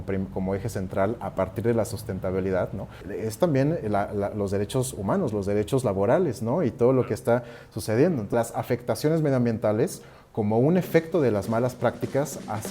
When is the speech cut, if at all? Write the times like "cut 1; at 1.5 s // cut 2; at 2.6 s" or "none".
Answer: cut 1; at 3.0 s // cut 2; at 8.3 s